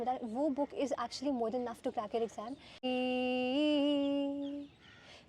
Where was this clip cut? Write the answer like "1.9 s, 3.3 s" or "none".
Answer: 2.8 s